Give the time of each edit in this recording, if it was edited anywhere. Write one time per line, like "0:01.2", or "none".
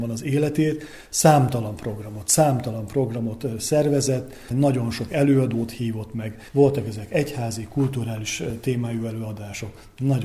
none